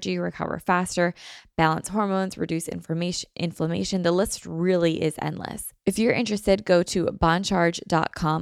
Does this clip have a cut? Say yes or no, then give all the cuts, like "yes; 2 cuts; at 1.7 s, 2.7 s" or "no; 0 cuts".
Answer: yes; 1 cut; at 5.7 s